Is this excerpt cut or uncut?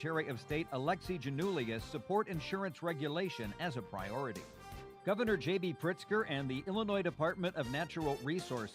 cut